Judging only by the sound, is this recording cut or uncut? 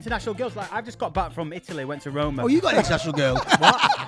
uncut